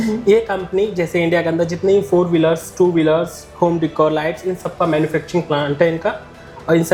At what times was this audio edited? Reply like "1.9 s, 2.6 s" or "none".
none